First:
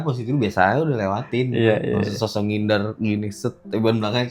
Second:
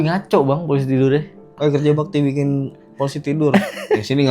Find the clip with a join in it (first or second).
second